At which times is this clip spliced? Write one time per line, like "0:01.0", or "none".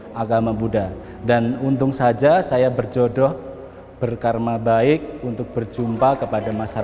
0:01.1

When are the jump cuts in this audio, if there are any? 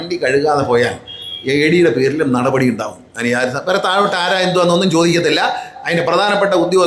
none

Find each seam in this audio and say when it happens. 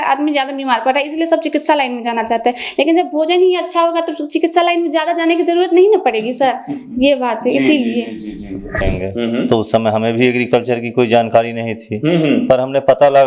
0:08.9

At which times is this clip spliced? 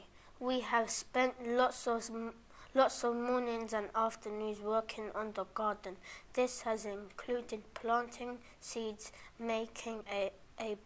none

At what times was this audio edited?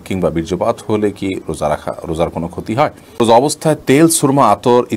0:03.2

